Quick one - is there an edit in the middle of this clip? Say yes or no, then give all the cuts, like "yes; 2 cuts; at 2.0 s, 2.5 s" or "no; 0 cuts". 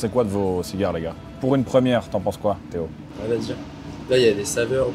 no; 0 cuts